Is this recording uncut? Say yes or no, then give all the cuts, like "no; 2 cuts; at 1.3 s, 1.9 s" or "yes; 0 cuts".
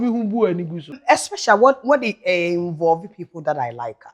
no; 1 cut; at 1.0 s